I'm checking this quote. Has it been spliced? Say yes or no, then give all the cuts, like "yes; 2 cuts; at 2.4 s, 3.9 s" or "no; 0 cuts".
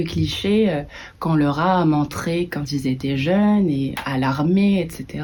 no; 0 cuts